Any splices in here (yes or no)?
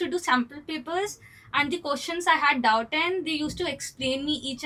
no